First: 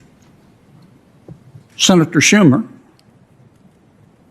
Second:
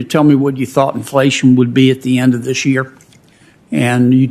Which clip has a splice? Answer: first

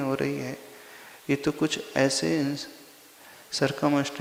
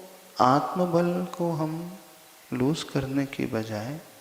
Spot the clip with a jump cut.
second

